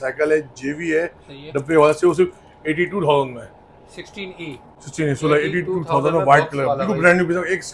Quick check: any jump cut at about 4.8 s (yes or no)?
no